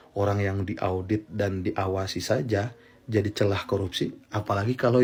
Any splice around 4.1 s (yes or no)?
no